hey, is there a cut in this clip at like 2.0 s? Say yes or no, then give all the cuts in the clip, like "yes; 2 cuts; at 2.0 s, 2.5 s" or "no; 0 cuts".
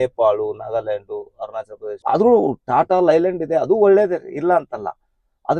yes; 1 cut; at 2.0 s